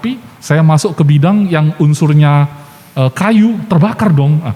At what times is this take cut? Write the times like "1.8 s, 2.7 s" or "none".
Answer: none